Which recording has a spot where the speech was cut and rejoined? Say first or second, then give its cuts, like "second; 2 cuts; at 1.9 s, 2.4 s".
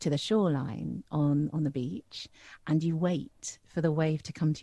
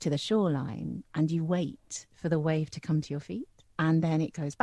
second; 2 cuts; at 1.0 s, 3.6 s